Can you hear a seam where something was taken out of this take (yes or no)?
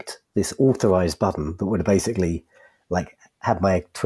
no